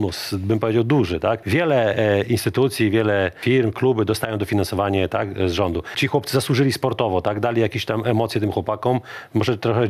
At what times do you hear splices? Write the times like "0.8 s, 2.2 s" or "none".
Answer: 1.4 s, 3.4 s, 5.9 s